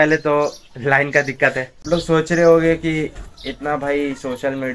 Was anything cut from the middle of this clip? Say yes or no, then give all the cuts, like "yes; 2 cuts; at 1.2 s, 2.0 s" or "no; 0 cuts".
yes; 1 cut; at 1.8 s